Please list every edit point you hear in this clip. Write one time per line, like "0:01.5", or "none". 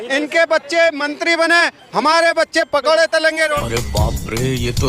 0:03.8